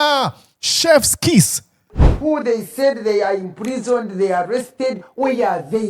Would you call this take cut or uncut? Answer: cut